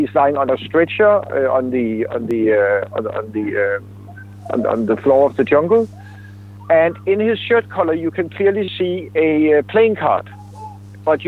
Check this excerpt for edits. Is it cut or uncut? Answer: uncut